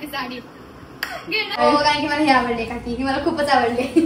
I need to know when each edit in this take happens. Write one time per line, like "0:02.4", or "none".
0:01.5